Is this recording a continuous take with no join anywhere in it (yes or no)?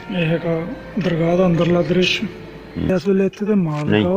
no